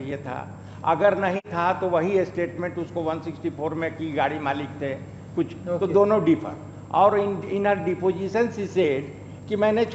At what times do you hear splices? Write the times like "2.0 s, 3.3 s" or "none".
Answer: none